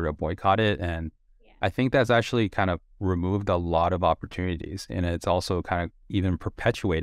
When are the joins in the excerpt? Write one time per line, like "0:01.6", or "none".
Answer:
0:02.9
0:06.0